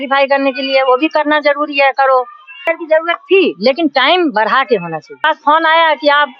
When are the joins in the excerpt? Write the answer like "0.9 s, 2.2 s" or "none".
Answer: 2.7 s, 5.2 s